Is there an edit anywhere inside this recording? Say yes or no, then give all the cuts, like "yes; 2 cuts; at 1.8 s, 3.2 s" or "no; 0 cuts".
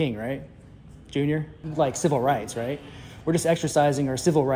yes; 1 cut; at 1.6 s